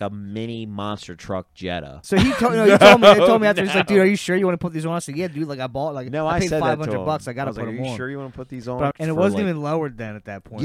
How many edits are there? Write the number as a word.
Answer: two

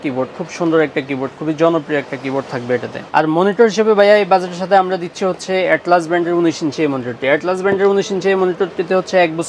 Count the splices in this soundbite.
one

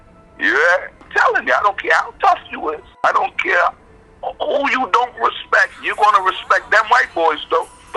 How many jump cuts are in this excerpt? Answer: two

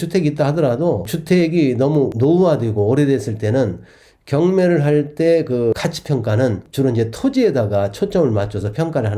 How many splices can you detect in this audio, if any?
two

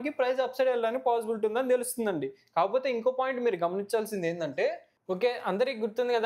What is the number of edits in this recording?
one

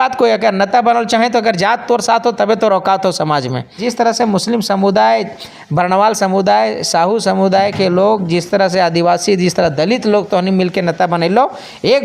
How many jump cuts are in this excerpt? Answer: one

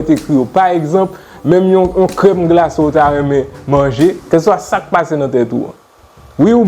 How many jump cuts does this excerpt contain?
one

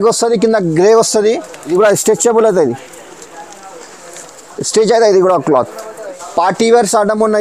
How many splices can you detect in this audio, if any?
two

